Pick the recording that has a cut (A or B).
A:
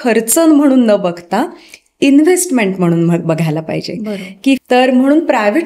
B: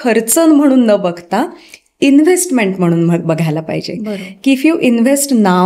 A